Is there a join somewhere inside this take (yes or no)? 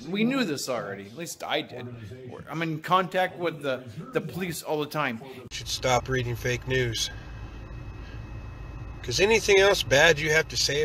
yes